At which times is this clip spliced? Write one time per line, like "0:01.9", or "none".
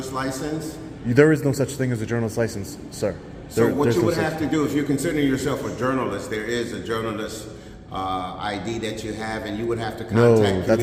none